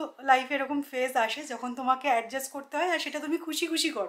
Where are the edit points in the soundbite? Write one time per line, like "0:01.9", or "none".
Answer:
none